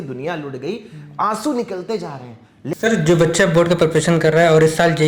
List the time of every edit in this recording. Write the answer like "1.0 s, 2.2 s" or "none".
2.7 s